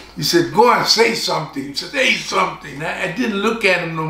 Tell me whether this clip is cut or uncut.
cut